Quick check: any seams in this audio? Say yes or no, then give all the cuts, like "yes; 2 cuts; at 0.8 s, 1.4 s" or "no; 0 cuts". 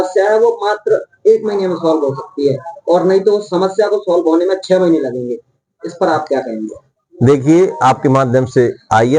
no; 0 cuts